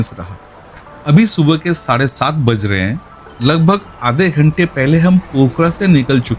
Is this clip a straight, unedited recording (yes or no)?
yes